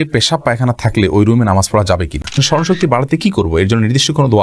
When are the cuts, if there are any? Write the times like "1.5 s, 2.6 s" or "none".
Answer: 2.4 s